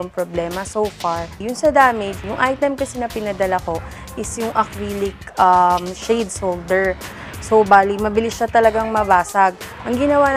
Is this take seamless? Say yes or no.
no